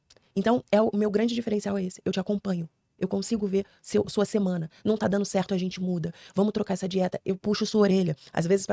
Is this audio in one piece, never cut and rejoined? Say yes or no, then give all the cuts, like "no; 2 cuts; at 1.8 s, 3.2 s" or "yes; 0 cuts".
yes; 0 cuts